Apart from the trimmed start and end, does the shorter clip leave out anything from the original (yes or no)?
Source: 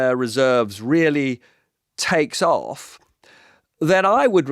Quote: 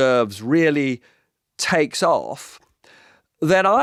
no